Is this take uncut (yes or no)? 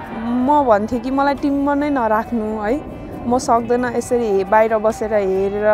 yes